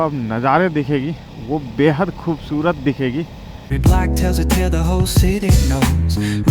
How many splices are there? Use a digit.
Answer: 1